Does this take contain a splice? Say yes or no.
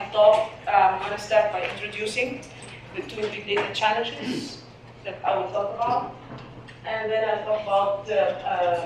no